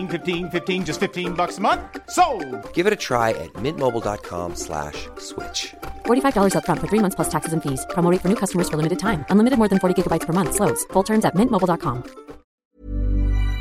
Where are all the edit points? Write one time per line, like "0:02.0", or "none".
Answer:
0:12.6